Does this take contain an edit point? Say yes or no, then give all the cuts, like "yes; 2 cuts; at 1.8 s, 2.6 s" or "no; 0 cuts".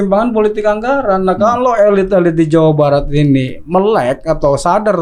no; 0 cuts